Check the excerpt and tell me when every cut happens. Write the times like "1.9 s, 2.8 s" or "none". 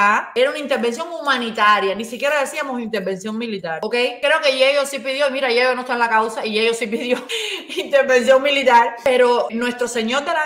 9.5 s